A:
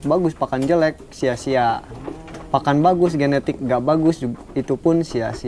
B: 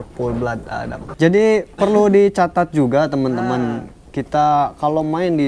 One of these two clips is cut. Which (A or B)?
B